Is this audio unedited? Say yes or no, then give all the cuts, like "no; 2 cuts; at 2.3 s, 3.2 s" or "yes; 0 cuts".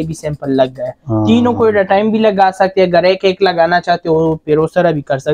yes; 0 cuts